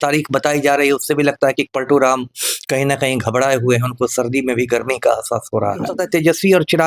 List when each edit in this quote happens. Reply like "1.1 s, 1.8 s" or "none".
6.0 s